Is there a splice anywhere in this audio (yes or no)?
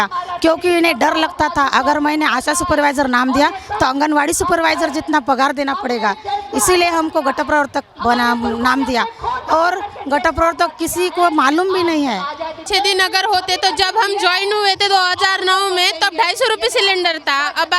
no